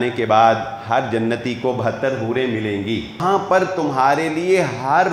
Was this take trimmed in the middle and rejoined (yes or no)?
yes